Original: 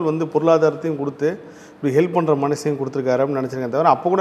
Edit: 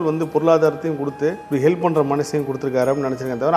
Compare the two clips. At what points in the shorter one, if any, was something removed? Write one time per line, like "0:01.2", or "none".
0:01.4